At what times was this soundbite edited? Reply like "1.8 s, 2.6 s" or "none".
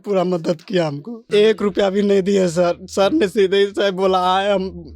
1.1 s

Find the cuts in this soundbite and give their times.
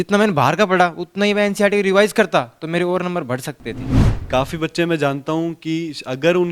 4.1 s

